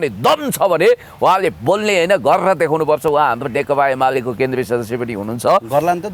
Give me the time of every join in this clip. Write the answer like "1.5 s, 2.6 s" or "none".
none